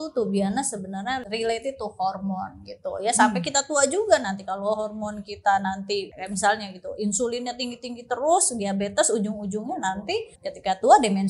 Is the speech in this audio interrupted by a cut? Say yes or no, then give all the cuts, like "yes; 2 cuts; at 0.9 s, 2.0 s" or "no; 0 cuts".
yes; 3 cuts; at 1.2 s, 6.1 s, 10.4 s